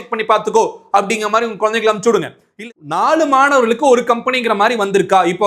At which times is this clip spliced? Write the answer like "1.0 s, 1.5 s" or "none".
2.4 s